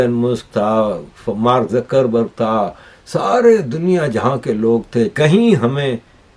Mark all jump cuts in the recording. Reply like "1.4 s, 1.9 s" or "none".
5.1 s